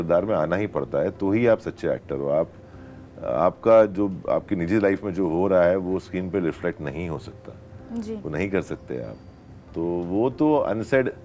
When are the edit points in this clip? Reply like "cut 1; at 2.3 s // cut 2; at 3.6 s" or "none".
none